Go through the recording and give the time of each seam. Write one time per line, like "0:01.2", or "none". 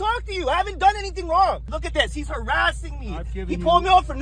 0:01.7

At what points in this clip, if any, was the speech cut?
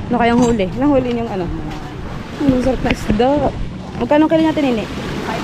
none

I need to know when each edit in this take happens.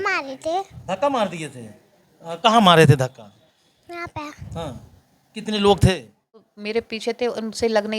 0:06.5

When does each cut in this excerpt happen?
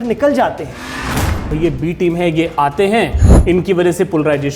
0:01.1

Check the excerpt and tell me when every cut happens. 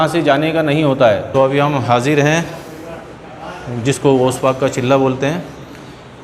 0:01.2

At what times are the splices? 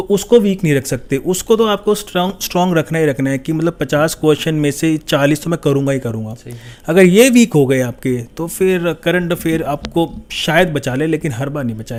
none

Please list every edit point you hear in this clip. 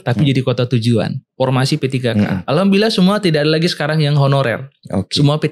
0:01.2

